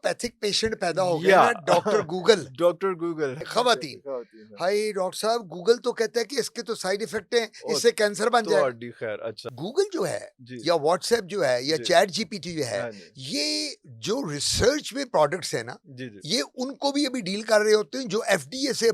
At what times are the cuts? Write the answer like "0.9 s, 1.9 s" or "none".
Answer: 3.5 s, 9.5 s